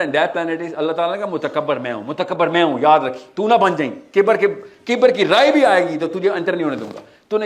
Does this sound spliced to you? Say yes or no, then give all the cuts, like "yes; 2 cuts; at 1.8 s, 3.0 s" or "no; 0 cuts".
no; 0 cuts